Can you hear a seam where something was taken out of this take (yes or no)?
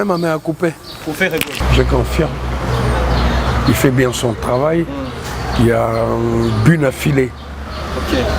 no